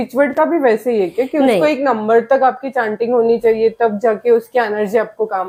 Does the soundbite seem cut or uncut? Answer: uncut